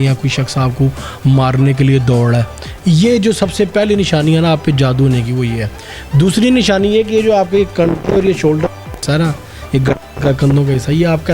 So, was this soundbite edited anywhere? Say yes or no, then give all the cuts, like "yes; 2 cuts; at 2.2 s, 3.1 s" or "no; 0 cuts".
no; 0 cuts